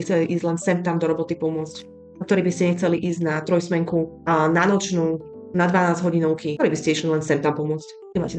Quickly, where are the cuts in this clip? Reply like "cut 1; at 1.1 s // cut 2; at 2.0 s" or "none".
none